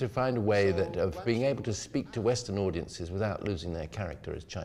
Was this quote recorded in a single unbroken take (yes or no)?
yes